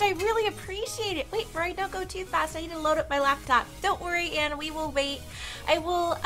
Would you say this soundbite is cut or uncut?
uncut